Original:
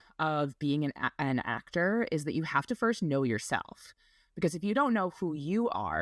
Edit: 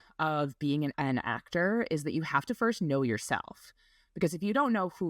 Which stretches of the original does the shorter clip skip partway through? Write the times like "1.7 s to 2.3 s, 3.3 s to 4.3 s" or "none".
0.9 s to 1.2 s